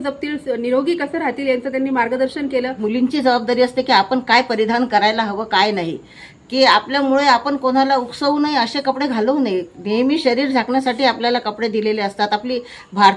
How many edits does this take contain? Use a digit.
1